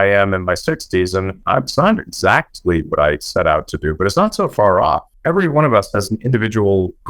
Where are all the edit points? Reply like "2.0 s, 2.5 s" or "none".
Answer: 1.4 s, 5.1 s